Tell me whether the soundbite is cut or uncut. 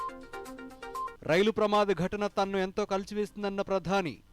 cut